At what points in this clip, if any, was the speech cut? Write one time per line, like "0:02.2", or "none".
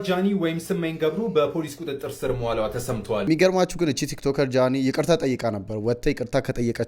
0:03.3